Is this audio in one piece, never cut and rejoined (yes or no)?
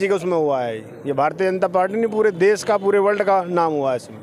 yes